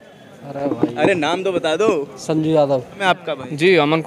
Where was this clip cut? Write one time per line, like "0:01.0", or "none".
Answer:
0:03.0